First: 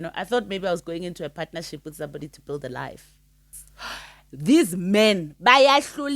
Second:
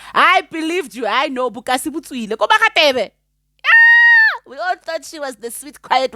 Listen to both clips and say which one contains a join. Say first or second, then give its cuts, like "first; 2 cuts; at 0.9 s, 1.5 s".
first; 1 cut; at 4.1 s